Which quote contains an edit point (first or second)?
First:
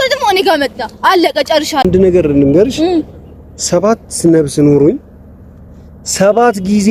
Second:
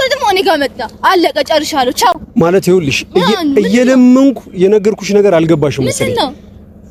first